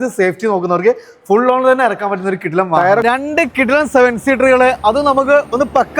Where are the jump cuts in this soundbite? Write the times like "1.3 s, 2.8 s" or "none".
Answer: 3.0 s